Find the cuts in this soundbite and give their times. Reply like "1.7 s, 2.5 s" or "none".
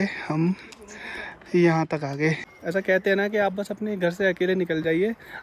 none